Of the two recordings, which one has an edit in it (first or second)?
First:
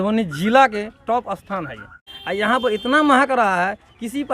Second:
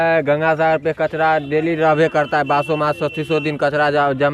first